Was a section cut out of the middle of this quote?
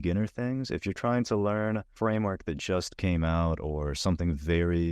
yes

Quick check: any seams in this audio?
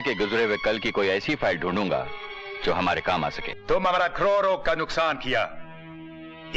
yes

